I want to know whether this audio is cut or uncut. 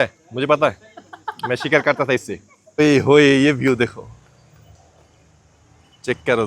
cut